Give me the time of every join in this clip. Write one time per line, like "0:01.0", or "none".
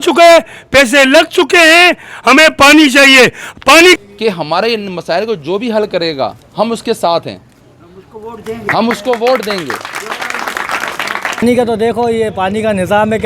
0:04.0
0:11.4

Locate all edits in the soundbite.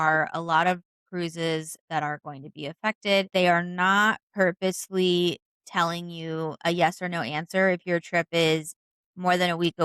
0:03.3

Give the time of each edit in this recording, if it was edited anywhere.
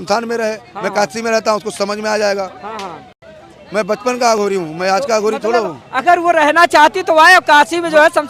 none

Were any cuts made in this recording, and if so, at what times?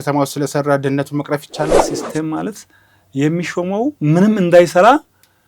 0:01.8

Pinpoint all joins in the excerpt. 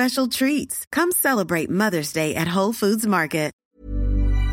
0:03.6

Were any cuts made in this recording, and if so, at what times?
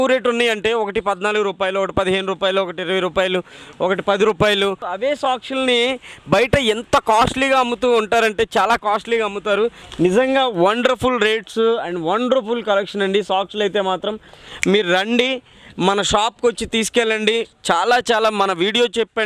0:04.9
0:09.8

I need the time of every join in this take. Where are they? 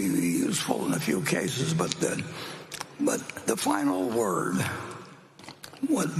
none

